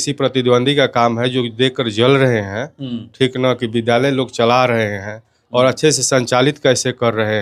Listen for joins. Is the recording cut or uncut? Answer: uncut